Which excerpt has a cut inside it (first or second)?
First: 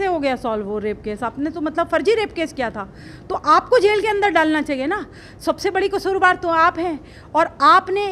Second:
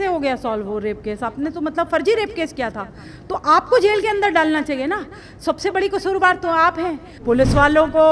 second